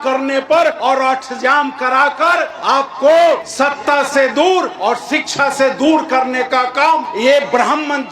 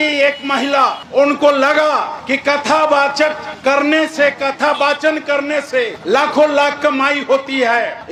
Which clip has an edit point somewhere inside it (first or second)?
first